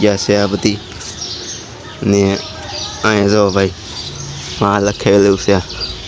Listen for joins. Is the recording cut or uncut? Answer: uncut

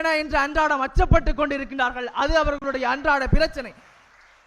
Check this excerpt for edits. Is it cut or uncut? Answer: uncut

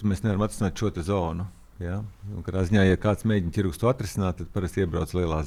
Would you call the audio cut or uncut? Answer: uncut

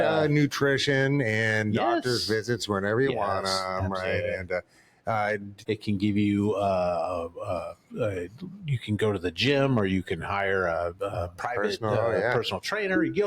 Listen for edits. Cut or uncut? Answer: cut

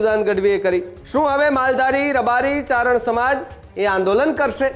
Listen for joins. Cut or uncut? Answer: cut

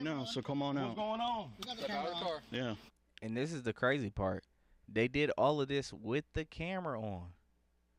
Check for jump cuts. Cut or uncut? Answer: uncut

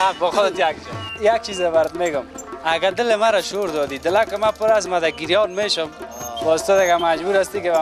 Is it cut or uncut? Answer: cut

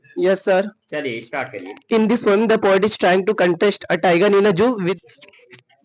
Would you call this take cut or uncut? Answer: cut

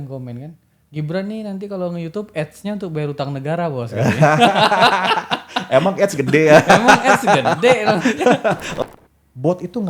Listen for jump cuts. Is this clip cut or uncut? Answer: cut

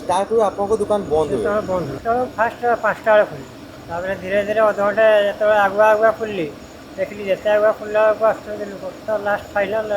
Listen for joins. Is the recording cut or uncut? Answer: cut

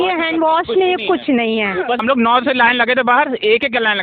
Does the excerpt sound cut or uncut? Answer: cut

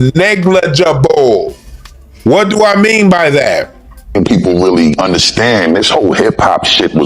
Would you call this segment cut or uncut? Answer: cut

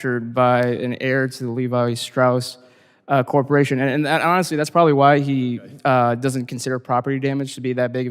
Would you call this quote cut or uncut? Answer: uncut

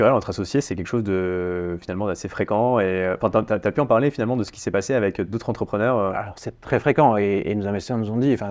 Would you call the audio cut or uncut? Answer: uncut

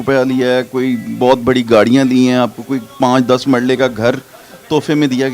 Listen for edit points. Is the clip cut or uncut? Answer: uncut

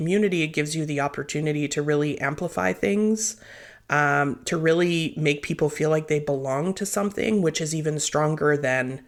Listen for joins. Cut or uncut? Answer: uncut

